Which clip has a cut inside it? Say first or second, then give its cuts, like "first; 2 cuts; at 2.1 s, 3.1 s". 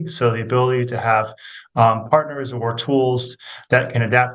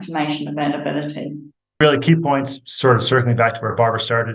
second; 1 cut; at 1.8 s